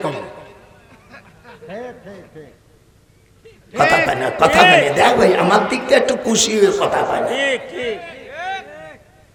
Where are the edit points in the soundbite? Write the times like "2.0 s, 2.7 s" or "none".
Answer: none